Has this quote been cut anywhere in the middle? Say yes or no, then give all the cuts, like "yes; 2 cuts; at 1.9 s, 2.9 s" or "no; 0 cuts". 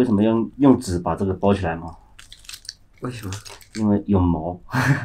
no; 0 cuts